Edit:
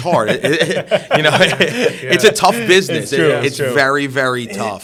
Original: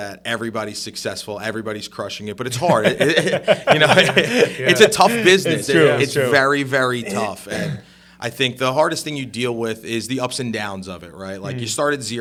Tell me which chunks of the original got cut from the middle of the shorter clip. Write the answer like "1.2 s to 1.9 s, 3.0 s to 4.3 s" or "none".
none